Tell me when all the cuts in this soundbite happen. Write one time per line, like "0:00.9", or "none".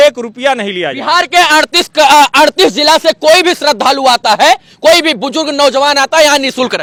none